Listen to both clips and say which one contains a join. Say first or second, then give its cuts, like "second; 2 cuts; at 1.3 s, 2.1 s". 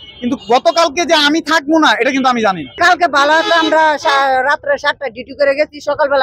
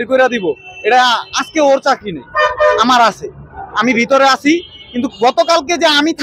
first; 1 cut; at 2.8 s